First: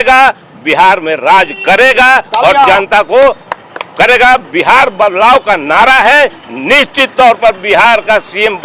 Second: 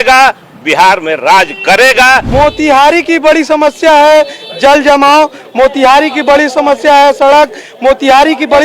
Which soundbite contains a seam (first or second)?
second